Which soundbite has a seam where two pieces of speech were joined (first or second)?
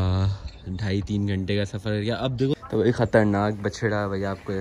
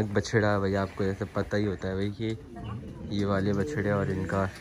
first